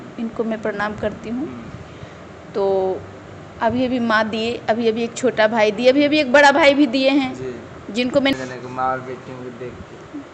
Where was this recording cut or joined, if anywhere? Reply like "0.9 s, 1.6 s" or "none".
8.3 s